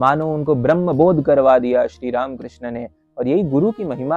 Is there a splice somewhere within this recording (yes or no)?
no